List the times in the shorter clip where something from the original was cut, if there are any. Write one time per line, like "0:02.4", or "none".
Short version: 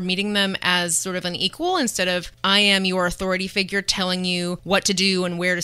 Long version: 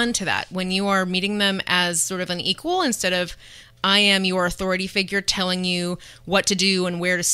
0:02.3
0:04.6